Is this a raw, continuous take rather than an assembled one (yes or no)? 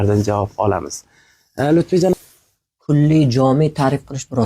no